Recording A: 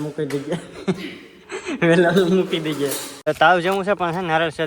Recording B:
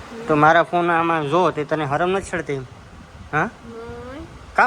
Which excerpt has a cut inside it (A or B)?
A